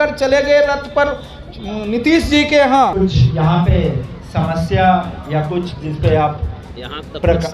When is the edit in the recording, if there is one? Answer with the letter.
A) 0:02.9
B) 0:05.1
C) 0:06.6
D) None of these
A